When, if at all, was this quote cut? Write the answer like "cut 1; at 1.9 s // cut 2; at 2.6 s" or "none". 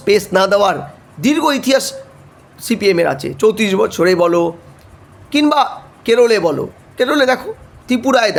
none